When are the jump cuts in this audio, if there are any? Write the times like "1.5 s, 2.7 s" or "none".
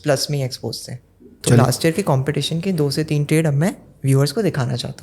1.2 s